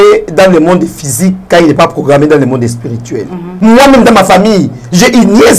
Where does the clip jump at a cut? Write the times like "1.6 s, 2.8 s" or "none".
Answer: 3.5 s